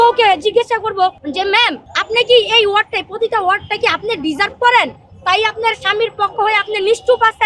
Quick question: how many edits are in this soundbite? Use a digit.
2